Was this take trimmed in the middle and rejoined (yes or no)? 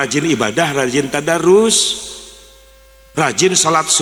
no